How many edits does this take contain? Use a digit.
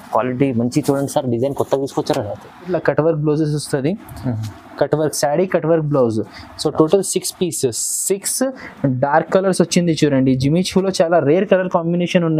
1